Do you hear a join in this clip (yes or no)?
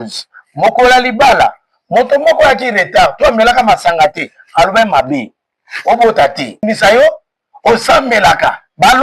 yes